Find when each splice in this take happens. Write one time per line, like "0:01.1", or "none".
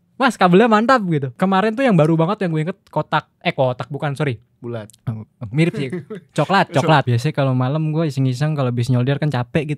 0:01.3
0:07.1

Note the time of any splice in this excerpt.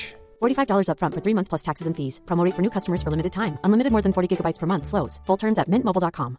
none

